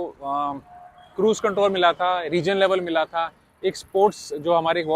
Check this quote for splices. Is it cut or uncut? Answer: uncut